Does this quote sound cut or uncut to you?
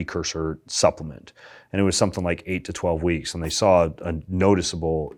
uncut